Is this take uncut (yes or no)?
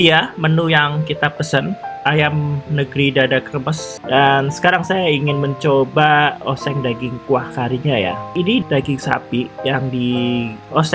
no